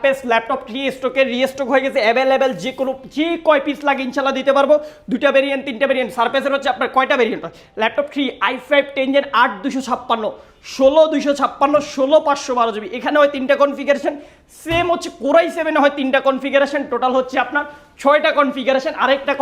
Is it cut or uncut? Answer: uncut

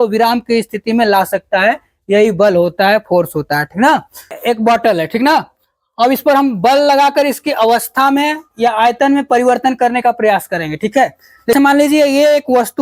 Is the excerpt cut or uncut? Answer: cut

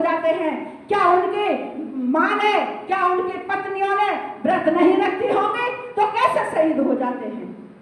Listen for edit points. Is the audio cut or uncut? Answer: uncut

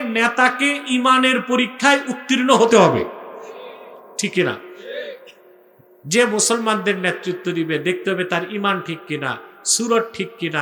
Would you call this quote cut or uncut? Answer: uncut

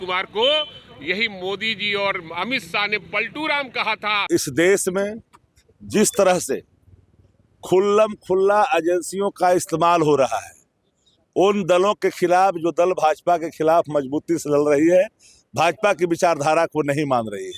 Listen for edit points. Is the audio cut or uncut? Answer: cut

